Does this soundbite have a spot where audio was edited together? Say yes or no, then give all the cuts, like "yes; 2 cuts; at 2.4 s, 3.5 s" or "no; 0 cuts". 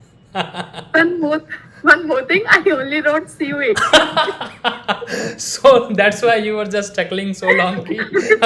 no; 0 cuts